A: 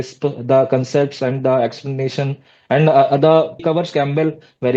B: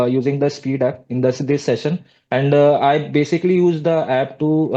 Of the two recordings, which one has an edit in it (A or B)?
A